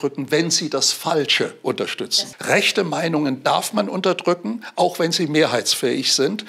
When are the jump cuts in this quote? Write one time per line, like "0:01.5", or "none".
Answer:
0:02.1